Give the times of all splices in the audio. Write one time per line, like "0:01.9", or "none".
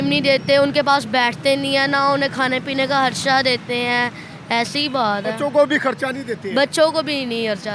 none